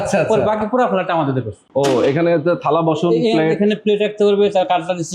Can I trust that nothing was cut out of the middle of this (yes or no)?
no